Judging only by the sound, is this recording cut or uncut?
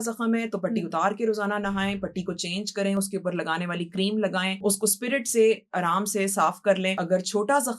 cut